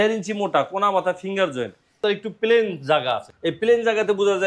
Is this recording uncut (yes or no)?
no